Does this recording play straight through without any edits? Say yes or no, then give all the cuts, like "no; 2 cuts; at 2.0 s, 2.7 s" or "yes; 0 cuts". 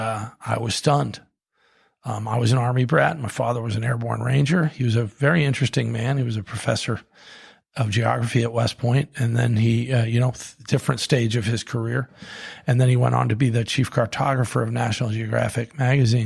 yes; 0 cuts